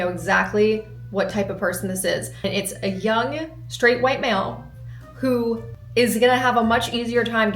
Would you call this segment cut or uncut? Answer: cut